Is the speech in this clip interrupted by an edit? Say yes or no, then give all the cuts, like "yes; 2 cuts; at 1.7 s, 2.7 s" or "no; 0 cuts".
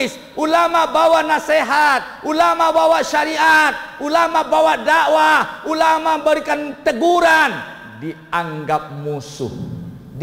no; 0 cuts